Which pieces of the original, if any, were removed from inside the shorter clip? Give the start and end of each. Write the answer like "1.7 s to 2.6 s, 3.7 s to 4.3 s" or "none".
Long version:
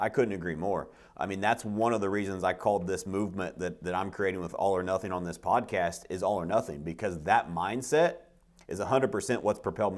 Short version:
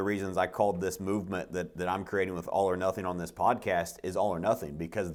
none